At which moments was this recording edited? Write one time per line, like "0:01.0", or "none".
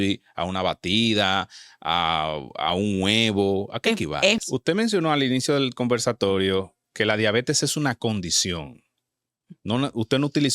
0:04.4